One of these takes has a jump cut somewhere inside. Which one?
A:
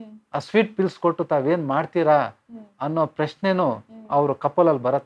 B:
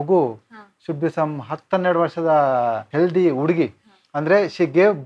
B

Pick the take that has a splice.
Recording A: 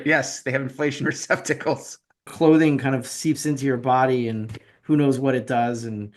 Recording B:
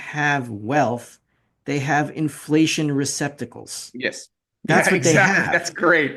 A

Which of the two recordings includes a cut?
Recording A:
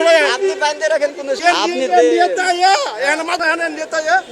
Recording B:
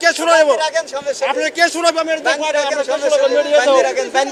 A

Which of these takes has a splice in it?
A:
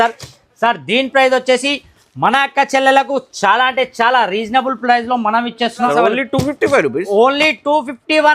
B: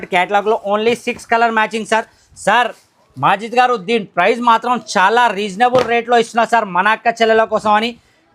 A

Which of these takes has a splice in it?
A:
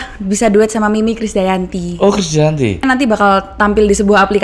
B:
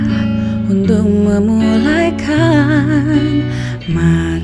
A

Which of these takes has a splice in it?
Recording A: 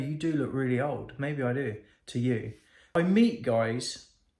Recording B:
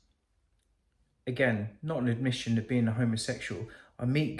A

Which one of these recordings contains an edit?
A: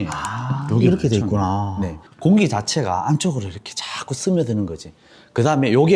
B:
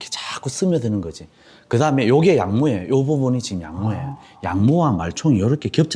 A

